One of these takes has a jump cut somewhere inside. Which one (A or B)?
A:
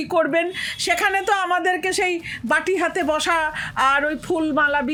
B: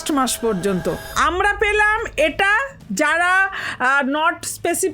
B